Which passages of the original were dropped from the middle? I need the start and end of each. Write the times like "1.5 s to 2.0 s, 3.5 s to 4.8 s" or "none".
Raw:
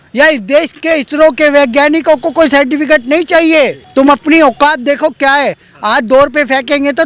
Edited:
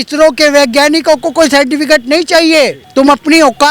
none